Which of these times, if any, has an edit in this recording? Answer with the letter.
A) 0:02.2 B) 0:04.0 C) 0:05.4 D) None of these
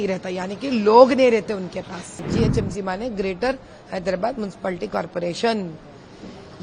A